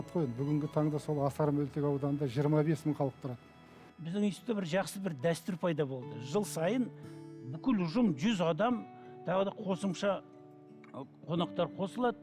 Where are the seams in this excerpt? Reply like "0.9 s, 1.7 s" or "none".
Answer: 3.9 s